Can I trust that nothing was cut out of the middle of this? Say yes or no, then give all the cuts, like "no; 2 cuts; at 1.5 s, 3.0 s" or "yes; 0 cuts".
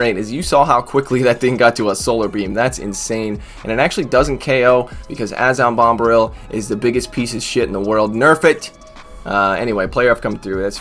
yes; 0 cuts